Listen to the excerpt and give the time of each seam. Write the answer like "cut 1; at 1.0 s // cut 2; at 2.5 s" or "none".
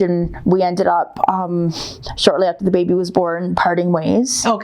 none